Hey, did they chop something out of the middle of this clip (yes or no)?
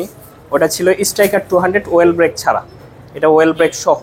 no